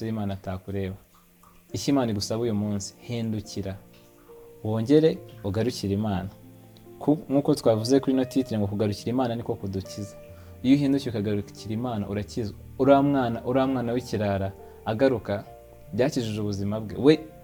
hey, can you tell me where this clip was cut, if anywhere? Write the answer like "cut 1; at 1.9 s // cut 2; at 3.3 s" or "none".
none